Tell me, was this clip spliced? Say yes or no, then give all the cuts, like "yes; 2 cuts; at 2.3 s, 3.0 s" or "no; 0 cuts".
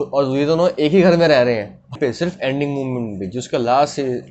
yes; 1 cut; at 2.0 s